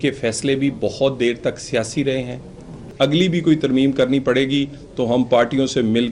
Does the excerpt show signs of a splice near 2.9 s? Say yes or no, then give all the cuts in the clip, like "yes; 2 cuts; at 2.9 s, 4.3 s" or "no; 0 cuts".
yes; 1 cut; at 2.9 s